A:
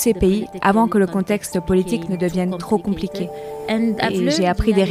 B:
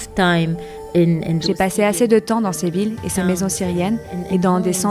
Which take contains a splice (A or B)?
B